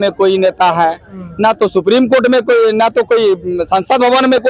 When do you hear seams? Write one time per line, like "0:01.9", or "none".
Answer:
none

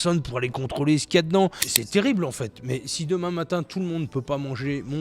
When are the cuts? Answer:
0:01.7

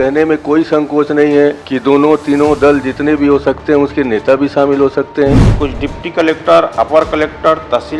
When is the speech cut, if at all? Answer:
0:01.7
0:05.5

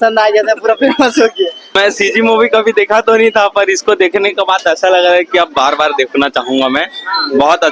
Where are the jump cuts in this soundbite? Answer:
none

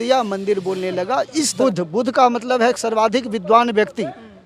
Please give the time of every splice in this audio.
0:01.6

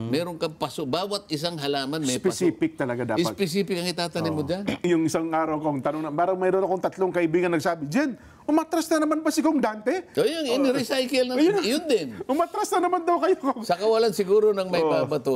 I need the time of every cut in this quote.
0:04.8

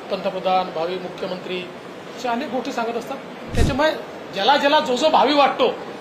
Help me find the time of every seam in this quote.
0:03.4

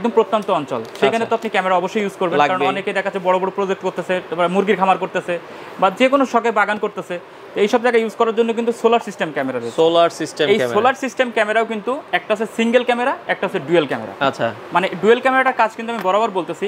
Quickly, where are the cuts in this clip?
none

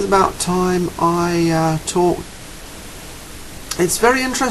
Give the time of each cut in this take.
none

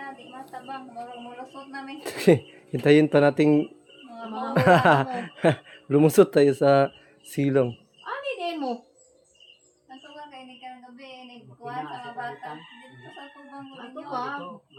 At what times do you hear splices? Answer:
none

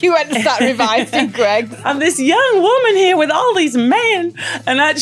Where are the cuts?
0:01.7

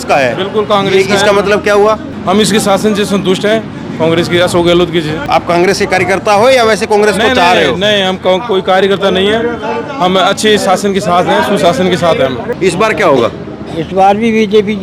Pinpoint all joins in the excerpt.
0:02.1
0:05.3
0:12.4

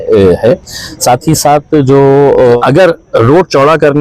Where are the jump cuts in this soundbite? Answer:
0:02.6

